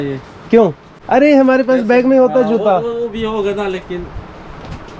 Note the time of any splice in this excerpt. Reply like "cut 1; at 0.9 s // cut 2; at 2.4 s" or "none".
cut 1; at 1.0 s